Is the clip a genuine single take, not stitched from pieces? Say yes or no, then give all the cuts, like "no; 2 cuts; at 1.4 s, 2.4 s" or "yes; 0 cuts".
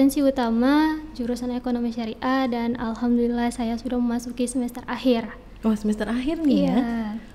yes; 0 cuts